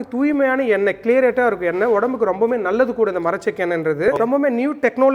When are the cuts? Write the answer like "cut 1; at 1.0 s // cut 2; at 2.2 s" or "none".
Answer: cut 1; at 4.2 s